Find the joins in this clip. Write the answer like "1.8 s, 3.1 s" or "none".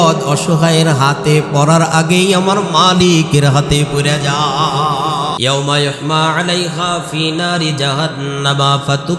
5.4 s